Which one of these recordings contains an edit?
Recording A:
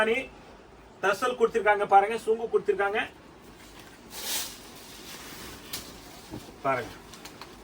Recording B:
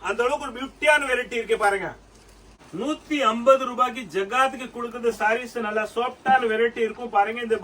B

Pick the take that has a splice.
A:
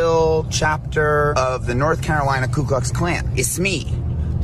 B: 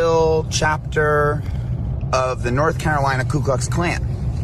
A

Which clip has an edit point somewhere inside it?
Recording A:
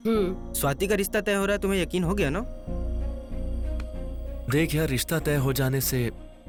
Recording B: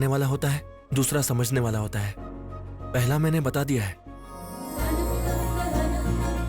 B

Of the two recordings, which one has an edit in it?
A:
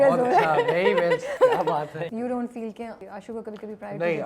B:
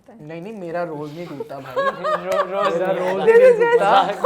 A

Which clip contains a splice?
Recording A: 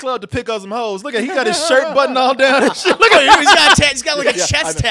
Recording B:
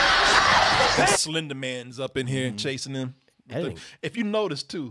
B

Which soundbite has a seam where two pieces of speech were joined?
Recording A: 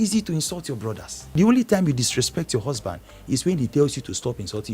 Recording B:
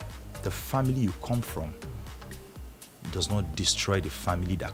A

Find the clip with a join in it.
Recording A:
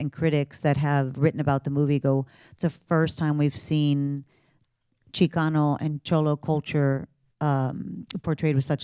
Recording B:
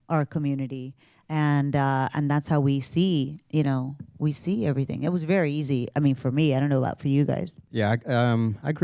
B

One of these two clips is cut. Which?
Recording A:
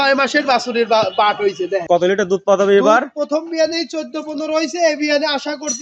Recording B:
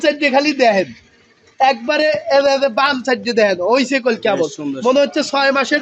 A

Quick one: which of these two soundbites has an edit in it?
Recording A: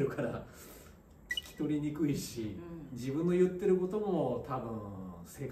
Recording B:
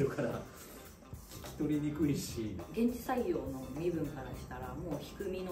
B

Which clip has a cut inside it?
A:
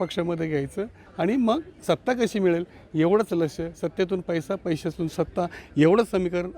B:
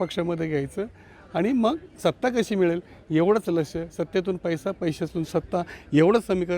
A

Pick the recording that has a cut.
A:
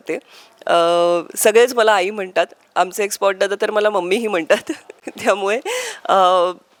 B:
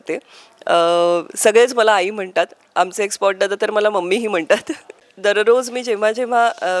B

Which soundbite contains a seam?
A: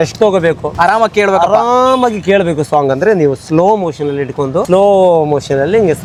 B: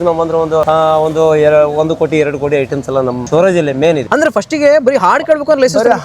B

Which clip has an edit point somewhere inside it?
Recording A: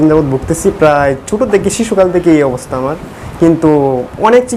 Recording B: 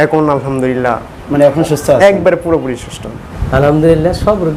B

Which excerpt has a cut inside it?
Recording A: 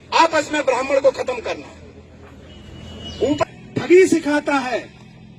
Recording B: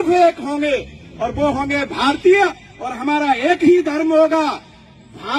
A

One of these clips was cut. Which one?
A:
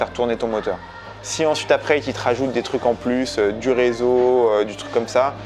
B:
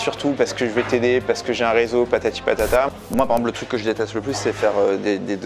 B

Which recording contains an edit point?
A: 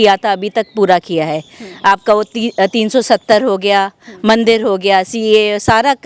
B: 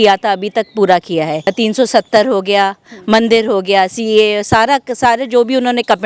B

